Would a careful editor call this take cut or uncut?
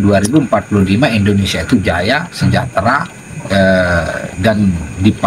uncut